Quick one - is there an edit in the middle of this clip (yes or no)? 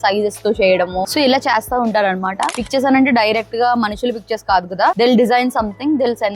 yes